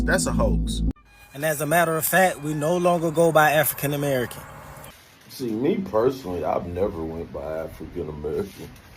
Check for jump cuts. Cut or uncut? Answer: cut